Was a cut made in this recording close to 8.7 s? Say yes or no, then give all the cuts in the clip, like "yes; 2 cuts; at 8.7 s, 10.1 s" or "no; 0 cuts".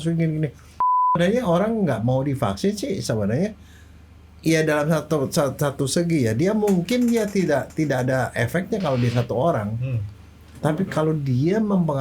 no; 1 cut; at 1.1 s